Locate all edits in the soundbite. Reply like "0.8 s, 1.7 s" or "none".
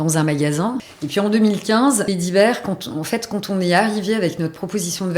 0.9 s, 2.0 s